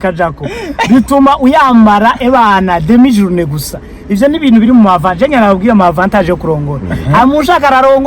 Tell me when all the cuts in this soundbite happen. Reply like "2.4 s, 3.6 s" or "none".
none